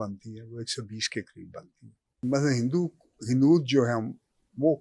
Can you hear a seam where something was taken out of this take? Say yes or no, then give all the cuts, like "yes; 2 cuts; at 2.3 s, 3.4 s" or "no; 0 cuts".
yes; 1 cut; at 2.2 s